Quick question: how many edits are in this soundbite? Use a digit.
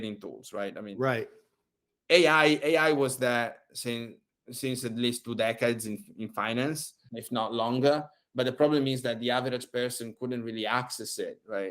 1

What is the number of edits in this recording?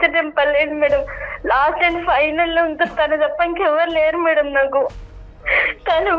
1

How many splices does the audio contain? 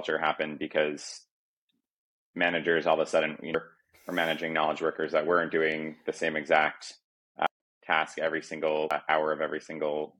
3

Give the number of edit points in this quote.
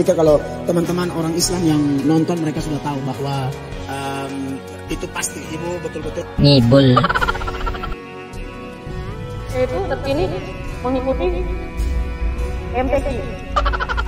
0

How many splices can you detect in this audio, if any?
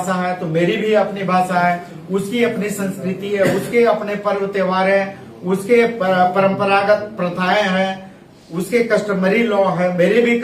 0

